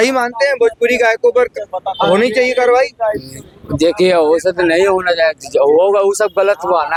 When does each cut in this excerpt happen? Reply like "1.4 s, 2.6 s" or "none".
none

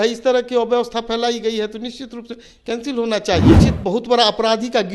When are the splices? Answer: 3.7 s

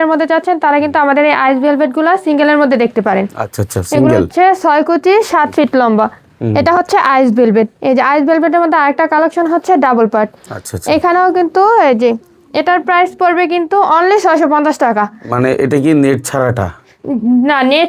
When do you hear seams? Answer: none

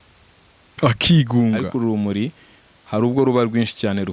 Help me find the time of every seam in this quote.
1.7 s

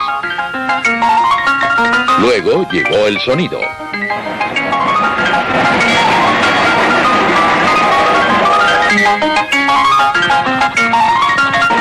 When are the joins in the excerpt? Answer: 5.6 s

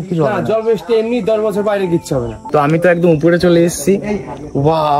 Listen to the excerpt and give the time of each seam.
2.4 s

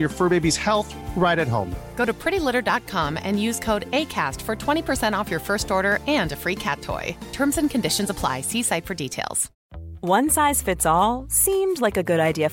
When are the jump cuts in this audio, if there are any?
9.6 s

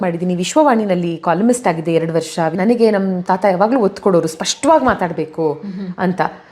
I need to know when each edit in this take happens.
2.5 s

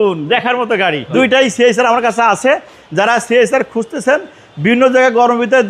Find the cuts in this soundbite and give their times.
1.0 s

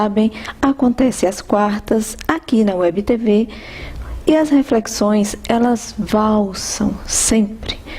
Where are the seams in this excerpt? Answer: 1.6 s

